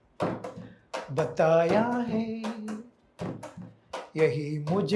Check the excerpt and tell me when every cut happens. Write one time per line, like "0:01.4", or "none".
none